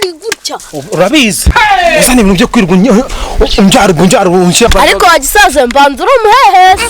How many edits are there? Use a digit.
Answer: 1